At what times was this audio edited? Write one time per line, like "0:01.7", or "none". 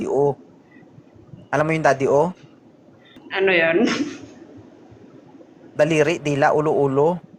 0:03.2